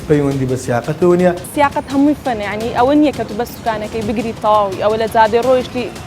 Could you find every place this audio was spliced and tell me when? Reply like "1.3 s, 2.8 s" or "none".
1.5 s